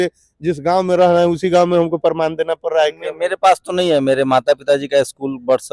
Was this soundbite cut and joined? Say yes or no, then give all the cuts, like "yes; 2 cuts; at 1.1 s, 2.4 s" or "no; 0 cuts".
no; 0 cuts